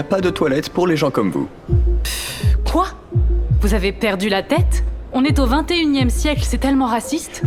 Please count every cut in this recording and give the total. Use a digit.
0